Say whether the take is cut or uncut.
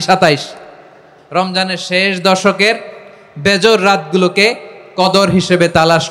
cut